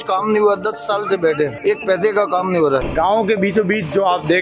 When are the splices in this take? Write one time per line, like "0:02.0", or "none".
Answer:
0:02.9